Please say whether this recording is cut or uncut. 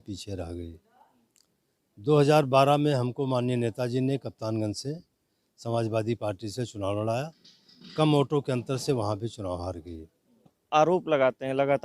cut